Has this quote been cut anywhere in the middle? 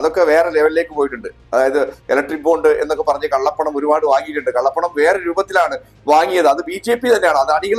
no; 0 cuts

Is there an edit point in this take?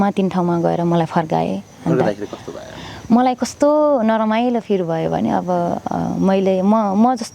no; 0 cuts

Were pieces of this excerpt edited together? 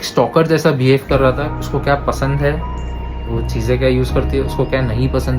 yes; 1 cut; at 1.5 s

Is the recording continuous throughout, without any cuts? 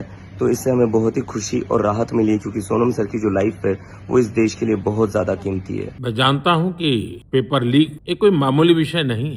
no; 3 cuts; at 5.9 s, 7.2 s, 8.0 s

